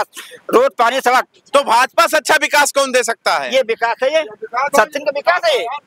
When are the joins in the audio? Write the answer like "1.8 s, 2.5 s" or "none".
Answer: none